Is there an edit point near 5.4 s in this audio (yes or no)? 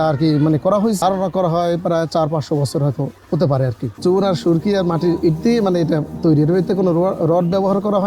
no